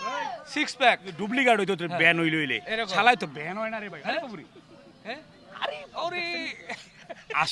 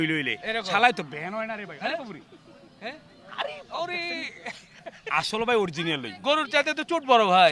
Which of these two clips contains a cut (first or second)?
first